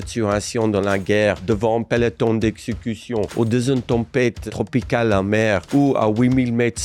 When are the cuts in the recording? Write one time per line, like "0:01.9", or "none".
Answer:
0:03.3
0:04.5
0:05.6